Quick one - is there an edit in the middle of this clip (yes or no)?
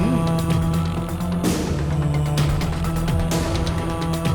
no